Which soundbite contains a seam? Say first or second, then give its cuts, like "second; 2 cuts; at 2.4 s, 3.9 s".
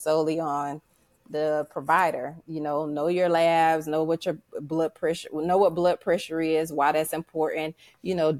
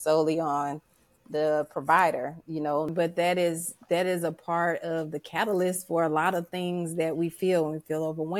second; 1 cut; at 2.9 s